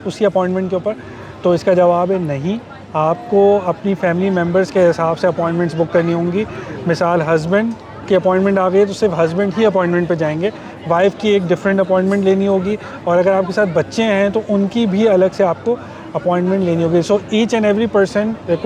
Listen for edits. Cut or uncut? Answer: uncut